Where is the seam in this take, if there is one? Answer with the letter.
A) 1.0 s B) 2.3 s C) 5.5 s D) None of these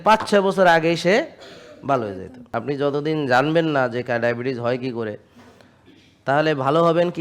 B